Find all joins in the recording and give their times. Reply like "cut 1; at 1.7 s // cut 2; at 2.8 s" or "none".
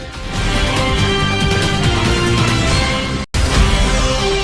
cut 1; at 3.2 s